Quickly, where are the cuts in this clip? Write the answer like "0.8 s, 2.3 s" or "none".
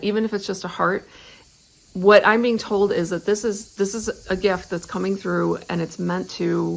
none